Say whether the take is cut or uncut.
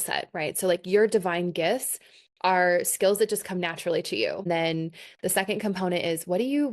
cut